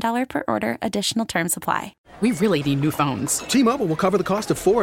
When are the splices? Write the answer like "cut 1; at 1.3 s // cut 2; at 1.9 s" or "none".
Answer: cut 1; at 2.0 s

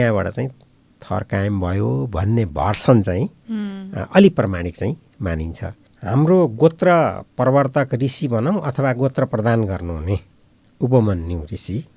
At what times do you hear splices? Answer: cut 1; at 5.8 s

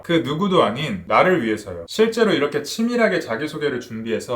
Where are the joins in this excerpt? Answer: cut 1; at 1.0 s // cut 2; at 1.8 s

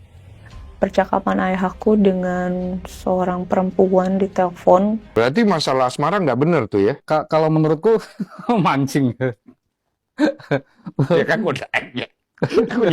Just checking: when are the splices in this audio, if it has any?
cut 1; at 5.0 s

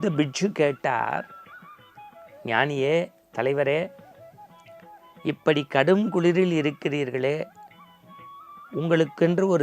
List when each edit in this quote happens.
none

